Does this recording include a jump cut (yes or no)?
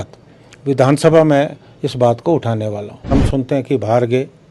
yes